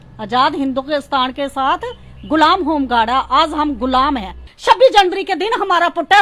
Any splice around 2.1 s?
no; 1 cut; at 4.5 s

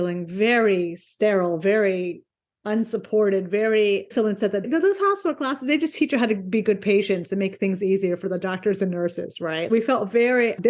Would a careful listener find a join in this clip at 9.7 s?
yes; 2 cuts; at 4.1 s, 9.7 s

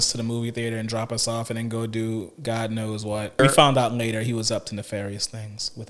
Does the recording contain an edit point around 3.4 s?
yes; 1 cut; at 3.4 s

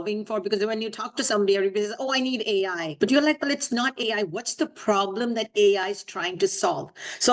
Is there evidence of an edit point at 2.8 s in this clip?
yes; 1 cut; at 2.8 s

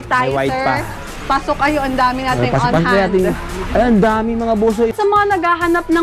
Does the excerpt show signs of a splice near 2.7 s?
no; 1 cut; at 4.9 s

